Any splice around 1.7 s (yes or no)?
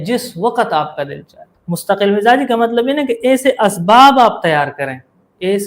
yes